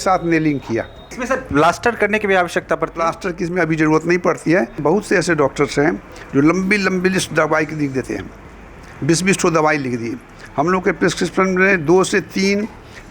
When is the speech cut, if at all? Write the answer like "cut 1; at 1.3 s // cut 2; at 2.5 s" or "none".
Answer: cut 1; at 1.2 s // cut 2; at 4.8 s